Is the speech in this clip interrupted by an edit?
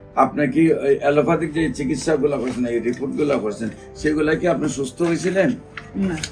no; 0 cuts

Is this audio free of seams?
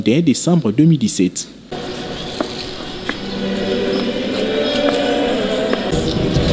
yes; 0 cuts

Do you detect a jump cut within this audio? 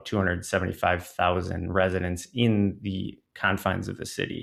no; 0 cuts

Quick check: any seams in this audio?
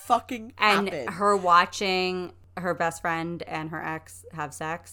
yes; 1 cut; at 2.4 s

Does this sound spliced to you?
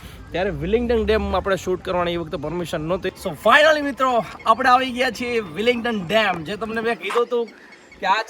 yes; 1 cut; at 3.1 s

